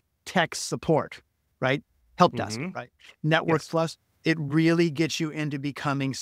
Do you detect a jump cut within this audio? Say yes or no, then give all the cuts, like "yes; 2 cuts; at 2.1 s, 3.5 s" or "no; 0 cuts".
no; 0 cuts